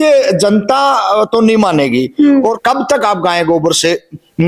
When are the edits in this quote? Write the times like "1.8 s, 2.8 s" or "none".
2.6 s